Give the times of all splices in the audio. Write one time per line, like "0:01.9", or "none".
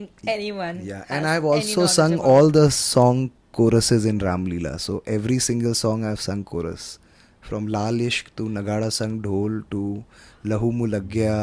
none